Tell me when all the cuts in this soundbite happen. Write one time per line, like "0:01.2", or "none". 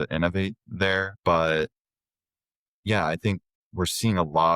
0:01.1
0:03.6